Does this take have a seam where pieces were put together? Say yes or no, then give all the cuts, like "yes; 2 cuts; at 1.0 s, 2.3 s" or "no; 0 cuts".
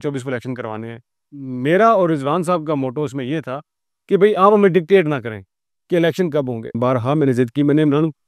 yes; 1 cut; at 6.8 s